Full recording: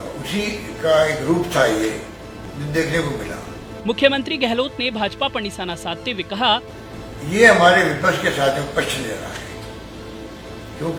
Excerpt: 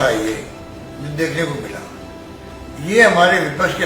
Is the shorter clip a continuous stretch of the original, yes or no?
no